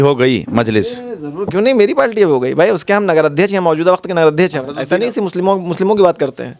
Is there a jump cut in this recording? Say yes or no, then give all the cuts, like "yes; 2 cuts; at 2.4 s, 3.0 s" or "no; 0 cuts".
yes; 1 cut; at 4.7 s